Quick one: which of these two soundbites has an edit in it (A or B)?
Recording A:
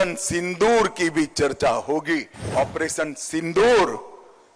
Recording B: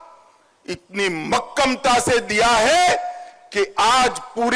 A